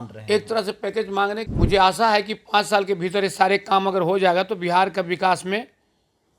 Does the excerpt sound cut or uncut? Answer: cut